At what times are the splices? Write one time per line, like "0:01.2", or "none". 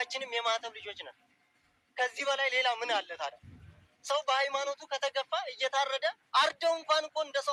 none